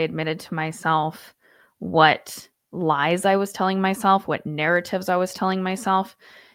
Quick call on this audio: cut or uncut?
uncut